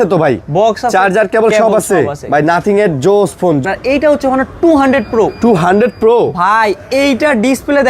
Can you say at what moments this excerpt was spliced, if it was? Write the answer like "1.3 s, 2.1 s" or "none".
3.7 s